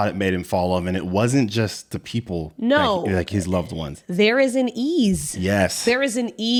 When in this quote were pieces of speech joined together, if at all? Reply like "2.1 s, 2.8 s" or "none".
none